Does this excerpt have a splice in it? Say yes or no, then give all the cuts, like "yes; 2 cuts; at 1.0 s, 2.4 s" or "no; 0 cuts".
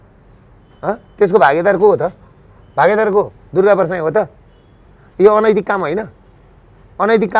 no; 0 cuts